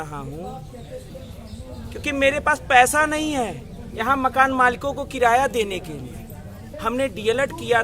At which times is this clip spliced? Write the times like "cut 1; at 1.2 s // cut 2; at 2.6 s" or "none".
cut 1; at 1.1 s // cut 2; at 6.7 s